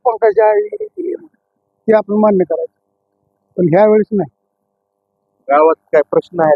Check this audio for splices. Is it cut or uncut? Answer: uncut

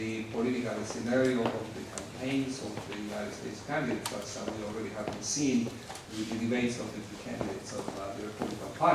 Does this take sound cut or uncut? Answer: uncut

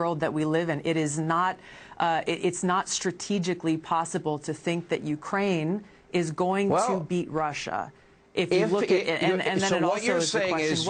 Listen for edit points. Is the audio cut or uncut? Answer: cut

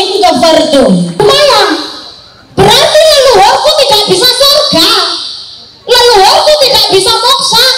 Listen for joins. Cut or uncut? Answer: cut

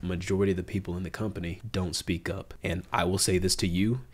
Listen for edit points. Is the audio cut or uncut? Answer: cut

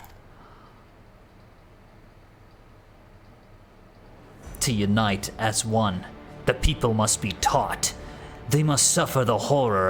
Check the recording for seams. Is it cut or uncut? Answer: uncut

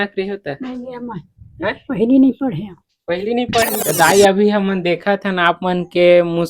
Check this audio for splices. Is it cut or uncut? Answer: cut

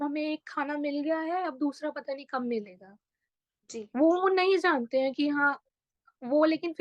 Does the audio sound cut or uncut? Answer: uncut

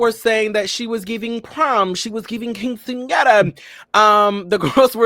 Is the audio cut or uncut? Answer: uncut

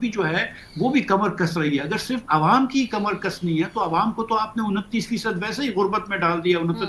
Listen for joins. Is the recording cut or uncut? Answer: uncut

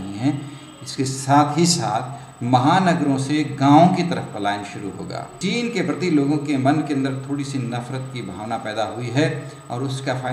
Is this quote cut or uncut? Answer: cut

